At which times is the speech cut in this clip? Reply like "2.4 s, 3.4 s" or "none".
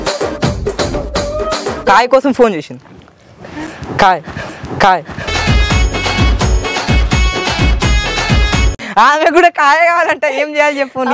none